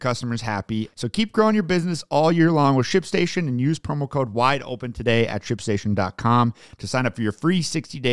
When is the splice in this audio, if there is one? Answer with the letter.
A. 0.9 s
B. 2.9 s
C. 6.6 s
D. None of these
A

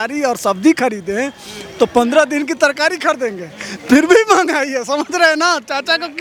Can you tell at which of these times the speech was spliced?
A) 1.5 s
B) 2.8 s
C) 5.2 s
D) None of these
D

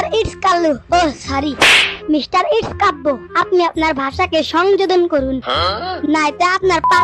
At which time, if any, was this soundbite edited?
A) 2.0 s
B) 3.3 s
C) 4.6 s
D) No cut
D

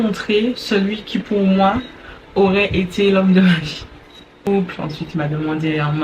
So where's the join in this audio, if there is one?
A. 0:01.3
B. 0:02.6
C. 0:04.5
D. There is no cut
C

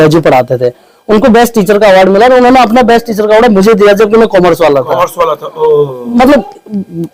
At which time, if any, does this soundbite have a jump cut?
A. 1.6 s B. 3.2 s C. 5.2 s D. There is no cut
D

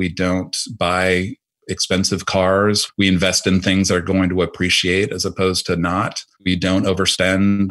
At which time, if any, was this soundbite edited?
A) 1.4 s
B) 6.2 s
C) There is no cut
B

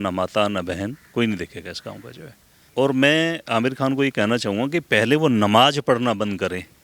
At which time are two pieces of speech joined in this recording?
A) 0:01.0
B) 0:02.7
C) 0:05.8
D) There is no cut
B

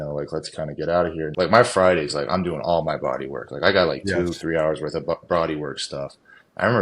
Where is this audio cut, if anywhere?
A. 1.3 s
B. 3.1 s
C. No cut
A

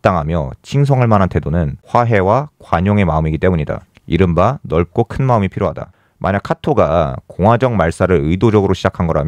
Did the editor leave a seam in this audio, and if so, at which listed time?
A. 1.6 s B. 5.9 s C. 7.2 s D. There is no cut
B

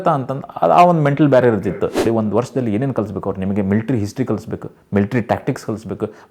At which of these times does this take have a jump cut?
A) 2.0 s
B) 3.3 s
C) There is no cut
A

